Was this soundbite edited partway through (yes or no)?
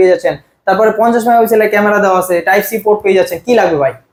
no